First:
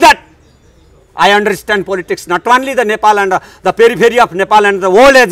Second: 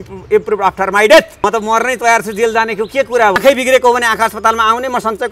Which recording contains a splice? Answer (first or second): second